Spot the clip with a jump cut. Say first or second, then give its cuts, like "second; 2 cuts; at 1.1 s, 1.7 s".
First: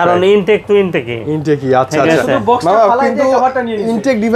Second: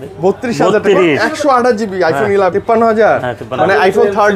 second; 1 cut; at 2.5 s